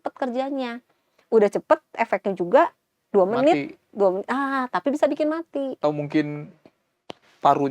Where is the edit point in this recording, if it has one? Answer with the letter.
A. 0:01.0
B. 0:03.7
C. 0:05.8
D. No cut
C